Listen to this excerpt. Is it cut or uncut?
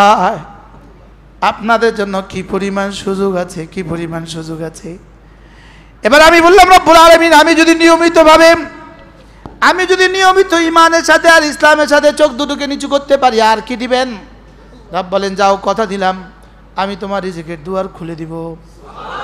uncut